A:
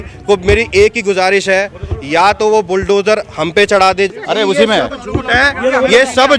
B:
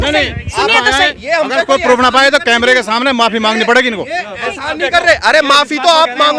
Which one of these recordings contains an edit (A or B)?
A